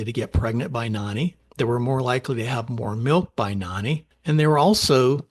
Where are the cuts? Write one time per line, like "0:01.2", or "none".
0:01.4
0:04.1